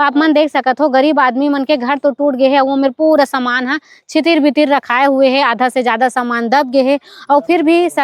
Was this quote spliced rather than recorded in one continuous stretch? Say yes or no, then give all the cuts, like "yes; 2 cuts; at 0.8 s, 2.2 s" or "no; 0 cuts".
no; 0 cuts